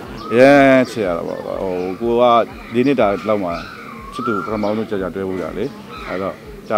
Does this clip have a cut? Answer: no; 0 cuts

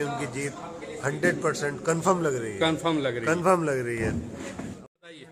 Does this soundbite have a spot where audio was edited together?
no; 0 cuts

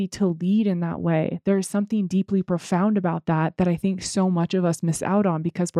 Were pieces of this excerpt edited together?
no; 0 cuts

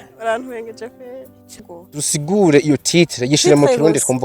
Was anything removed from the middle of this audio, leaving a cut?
yes; 1 cut; at 1.8 s

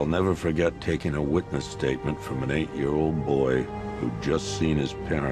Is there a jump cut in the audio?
no; 0 cuts

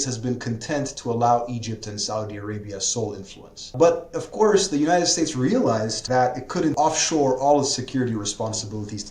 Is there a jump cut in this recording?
yes; 3 cuts; at 3.7 s, 6.0 s, 6.7 s

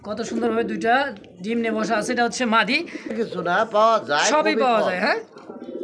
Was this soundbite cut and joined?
yes; 1 cut; at 3.1 s

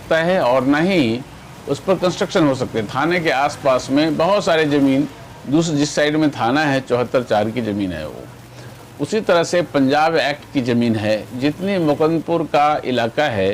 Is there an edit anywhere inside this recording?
no; 0 cuts

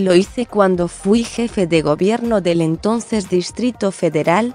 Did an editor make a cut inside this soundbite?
no; 0 cuts

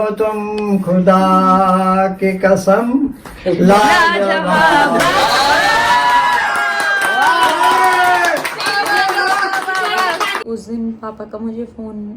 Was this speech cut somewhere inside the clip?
yes; 1 cut; at 10.5 s

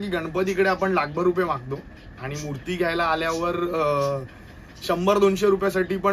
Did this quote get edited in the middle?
no; 0 cuts

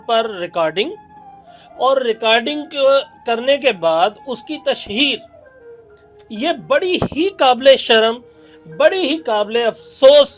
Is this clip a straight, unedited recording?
yes; 0 cuts

